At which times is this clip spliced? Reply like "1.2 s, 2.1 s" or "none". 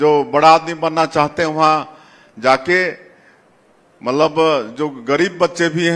none